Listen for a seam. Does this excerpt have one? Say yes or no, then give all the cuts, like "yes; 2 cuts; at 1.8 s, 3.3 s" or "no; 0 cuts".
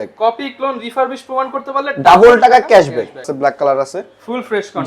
yes; 1 cut; at 3.3 s